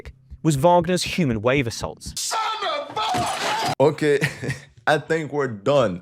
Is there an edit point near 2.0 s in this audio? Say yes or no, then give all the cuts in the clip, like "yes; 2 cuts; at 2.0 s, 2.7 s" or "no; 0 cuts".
no; 0 cuts